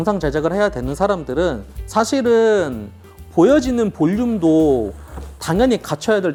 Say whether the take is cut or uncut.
uncut